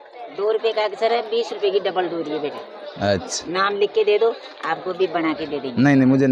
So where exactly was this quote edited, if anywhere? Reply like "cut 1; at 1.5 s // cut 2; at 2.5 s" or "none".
none